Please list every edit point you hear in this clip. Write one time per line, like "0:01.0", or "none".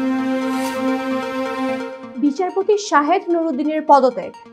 none

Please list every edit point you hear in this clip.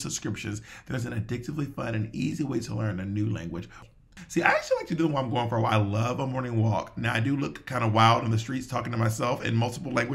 0:03.8

